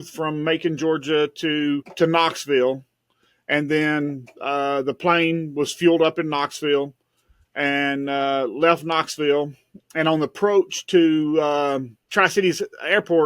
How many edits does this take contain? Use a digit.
2